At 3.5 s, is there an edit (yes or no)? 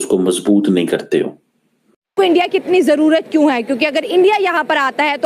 no